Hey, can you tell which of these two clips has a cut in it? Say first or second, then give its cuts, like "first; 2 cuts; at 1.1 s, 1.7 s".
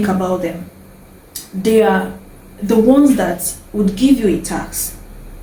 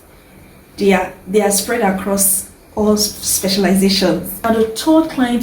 second; 1 cut; at 4.3 s